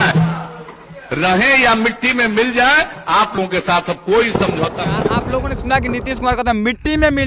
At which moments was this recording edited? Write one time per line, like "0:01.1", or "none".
0:05.1